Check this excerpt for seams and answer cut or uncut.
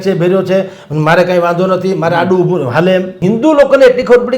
cut